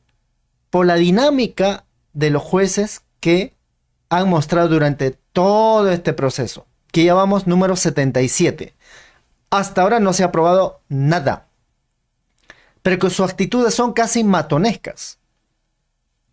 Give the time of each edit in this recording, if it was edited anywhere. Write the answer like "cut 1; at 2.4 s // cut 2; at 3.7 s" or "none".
none